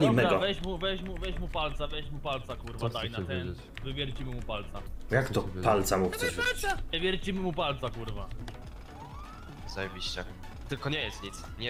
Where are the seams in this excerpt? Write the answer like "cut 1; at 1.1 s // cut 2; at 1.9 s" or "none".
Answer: cut 1; at 8.4 s